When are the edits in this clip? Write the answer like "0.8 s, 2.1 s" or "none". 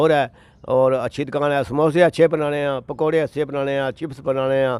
none